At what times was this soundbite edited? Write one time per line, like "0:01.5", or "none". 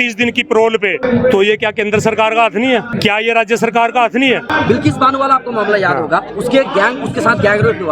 0:01.0
0:02.9
0:04.5